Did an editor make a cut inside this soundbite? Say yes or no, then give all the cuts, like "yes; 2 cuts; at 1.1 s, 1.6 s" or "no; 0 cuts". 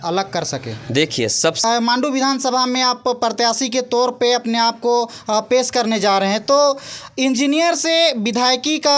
yes; 1 cut; at 1.6 s